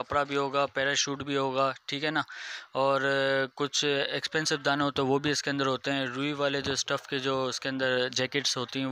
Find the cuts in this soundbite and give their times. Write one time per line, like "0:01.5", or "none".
none